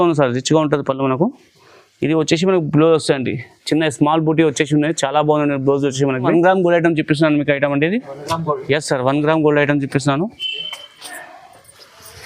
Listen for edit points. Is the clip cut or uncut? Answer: cut